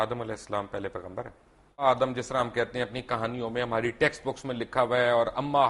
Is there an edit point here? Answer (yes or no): yes